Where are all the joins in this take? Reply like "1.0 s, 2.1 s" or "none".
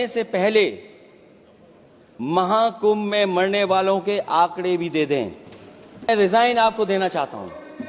6.1 s